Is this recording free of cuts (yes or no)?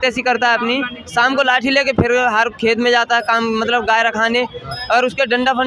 yes